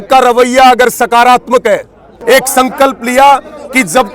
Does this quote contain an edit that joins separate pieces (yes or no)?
yes